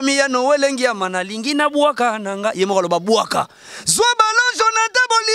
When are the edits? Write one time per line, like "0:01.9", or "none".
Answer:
none